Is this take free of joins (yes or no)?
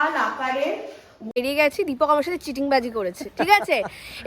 no